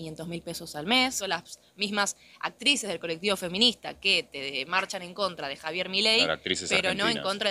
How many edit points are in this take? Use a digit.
1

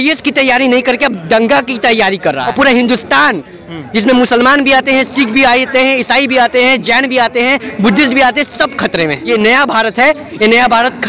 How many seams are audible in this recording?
2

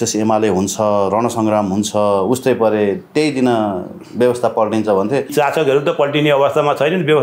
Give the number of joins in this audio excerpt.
1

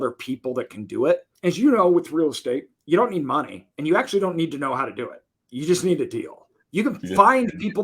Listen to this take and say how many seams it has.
2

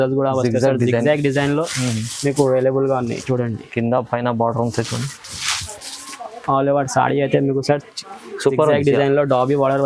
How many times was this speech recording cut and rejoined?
0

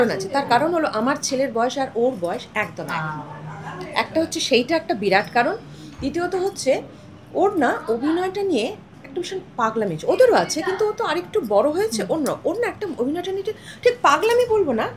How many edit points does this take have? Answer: 0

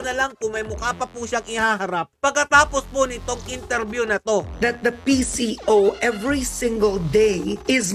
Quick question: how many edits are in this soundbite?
1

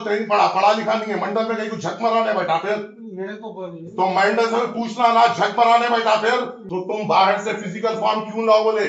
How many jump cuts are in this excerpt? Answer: 1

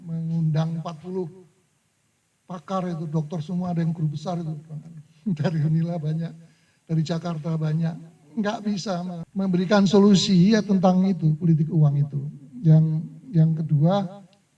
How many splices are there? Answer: 1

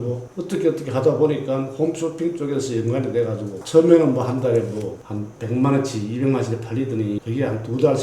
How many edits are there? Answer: 2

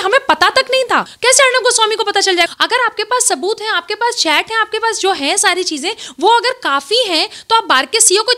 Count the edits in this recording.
2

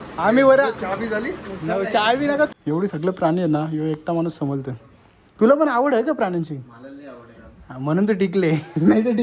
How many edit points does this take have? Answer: 1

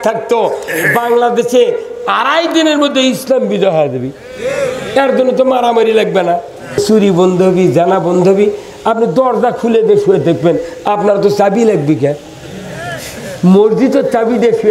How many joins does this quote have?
1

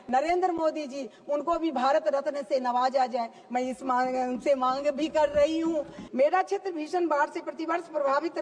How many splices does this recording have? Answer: 1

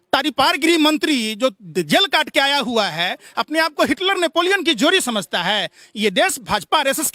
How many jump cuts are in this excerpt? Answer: 0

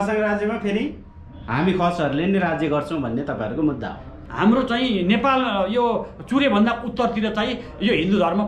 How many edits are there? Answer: 1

